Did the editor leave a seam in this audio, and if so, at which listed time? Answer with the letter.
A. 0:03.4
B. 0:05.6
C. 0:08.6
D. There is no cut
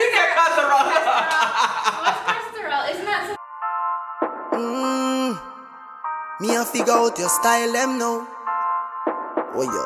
A